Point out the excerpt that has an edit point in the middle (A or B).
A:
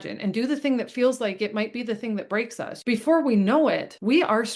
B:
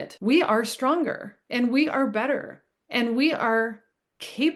A